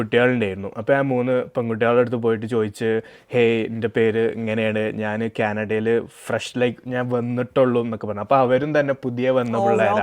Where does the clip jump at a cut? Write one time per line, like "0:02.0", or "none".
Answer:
none